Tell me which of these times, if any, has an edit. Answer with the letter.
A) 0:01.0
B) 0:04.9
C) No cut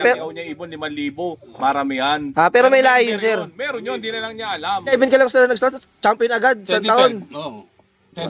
B